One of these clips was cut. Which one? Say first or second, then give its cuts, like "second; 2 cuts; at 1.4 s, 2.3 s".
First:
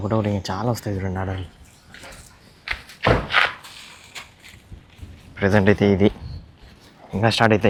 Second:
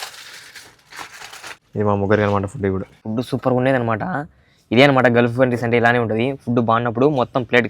second; 2 cuts; at 1.6 s, 3.0 s